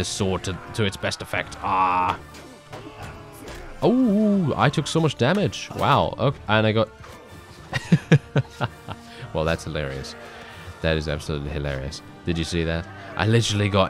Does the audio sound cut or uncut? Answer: uncut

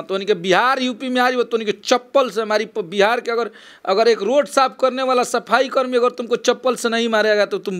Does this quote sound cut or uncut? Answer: uncut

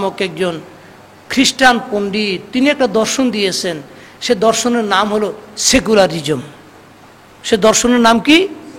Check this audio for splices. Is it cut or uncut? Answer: uncut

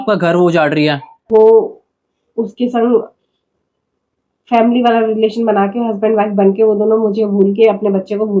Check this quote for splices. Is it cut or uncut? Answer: cut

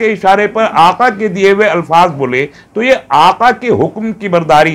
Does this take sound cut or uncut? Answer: uncut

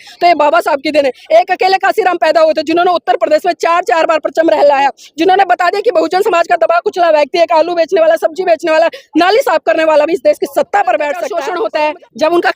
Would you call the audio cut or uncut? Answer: cut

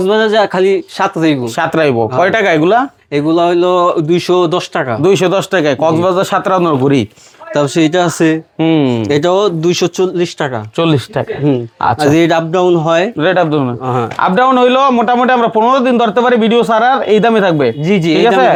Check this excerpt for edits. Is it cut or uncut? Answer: uncut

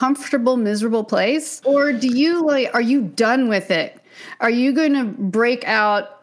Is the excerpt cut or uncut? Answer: cut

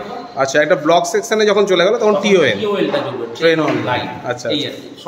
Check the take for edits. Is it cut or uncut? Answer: uncut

